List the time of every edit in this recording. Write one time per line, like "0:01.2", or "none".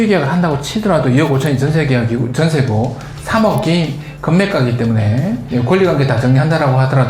0:05.4